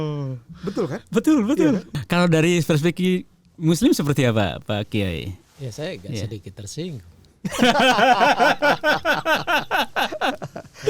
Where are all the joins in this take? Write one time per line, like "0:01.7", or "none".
0:01.9